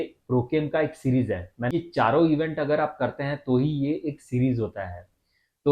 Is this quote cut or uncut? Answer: cut